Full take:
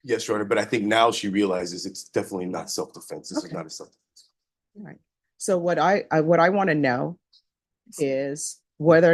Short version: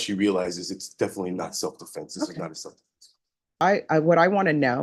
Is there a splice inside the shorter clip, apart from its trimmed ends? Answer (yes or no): yes